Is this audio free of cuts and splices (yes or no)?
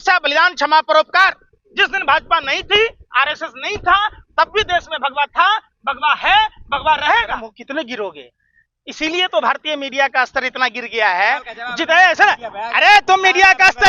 no